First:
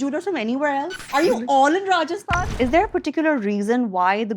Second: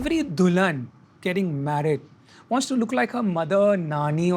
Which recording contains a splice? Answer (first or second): first